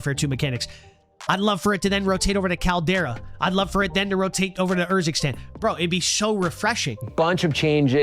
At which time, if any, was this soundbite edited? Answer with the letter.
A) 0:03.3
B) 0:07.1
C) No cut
B